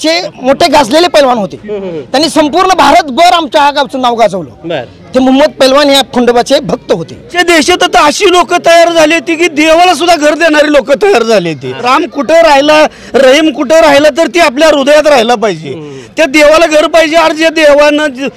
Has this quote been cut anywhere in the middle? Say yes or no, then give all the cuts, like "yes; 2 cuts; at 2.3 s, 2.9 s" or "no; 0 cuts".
yes; 2 cuts; at 7.4 s, 11.8 s